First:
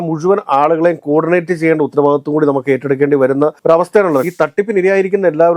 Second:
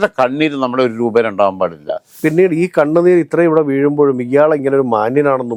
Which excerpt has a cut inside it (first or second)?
first